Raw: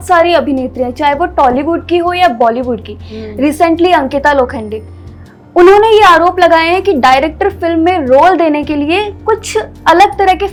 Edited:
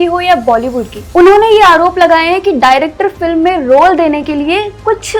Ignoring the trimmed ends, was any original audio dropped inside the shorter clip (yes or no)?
yes